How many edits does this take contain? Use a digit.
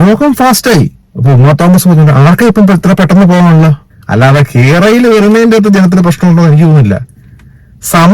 2